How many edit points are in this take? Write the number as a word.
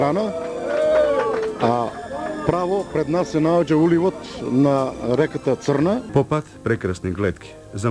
one